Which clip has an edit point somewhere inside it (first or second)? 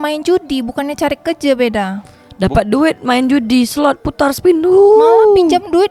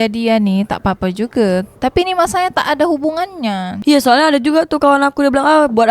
second